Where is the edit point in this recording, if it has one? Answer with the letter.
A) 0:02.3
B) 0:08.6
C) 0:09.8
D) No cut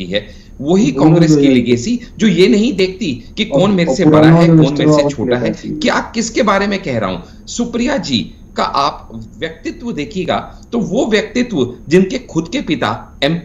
D